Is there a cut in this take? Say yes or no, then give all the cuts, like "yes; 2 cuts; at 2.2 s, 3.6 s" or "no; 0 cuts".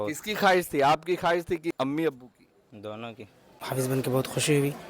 yes; 2 cuts; at 1.7 s, 3.6 s